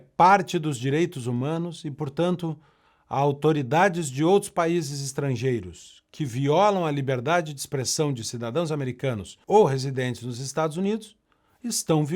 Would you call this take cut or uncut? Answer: cut